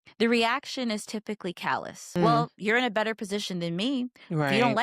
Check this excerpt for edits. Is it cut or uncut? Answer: cut